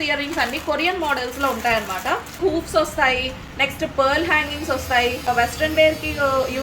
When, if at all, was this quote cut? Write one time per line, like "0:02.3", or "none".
0:02.4
0:05.3